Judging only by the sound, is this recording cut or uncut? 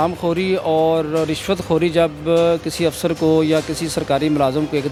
uncut